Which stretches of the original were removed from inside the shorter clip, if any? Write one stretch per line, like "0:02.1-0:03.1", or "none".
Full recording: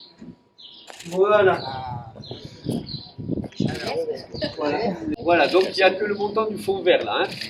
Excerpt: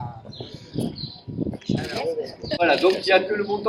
0:04.5-0:05.3